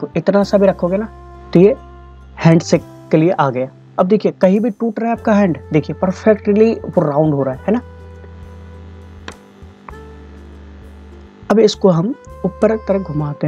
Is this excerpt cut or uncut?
uncut